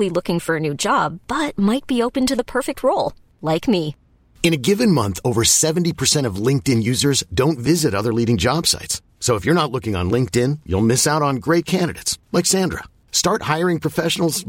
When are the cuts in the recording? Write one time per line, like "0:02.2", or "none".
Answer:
none